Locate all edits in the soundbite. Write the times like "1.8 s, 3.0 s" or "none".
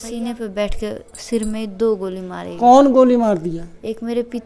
none